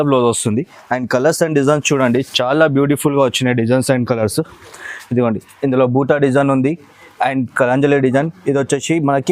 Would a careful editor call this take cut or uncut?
uncut